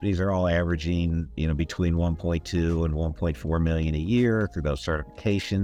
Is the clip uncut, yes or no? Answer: yes